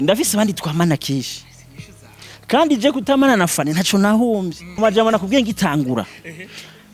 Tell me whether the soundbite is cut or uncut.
cut